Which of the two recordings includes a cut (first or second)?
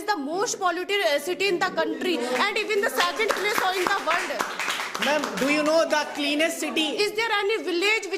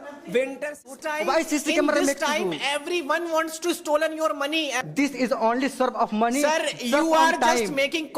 second